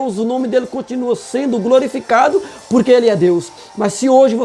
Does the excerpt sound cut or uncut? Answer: uncut